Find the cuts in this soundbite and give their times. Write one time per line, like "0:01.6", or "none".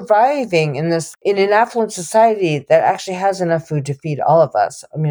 0:01.2